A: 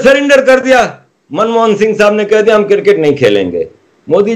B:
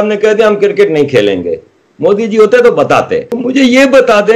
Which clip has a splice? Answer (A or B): B